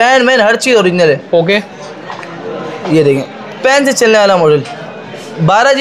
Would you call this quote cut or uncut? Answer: uncut